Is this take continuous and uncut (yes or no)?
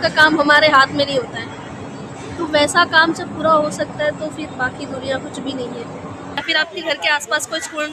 no